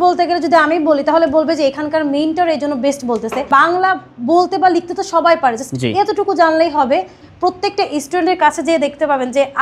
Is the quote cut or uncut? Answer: cut